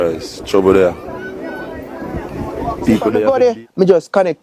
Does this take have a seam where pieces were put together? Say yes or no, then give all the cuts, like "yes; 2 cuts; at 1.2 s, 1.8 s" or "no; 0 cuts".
yes; 1 cut; at 3.2 s